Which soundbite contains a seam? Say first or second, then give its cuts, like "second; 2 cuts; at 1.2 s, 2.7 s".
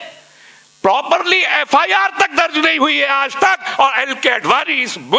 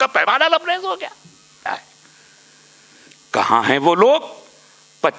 second; 1 cut; at 1.7 s